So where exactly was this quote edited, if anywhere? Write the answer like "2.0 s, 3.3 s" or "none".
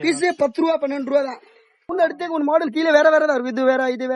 1.9 s